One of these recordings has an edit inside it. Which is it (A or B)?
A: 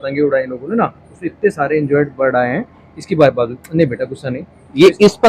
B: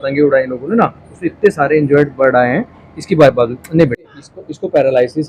B